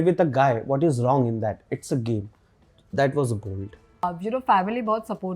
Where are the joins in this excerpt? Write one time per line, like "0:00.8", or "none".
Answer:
0:04.0